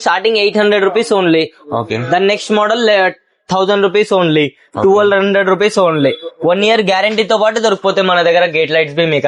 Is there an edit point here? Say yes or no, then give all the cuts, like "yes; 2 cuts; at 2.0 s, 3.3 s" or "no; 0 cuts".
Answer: no; 0 cuts